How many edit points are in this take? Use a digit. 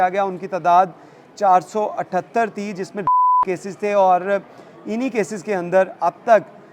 0